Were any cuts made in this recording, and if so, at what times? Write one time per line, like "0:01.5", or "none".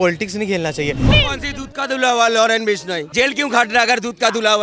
0:01.1
0:03.0